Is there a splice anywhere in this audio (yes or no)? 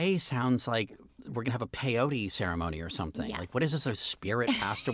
yes